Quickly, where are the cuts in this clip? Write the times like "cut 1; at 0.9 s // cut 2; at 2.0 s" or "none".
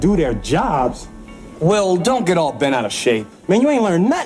none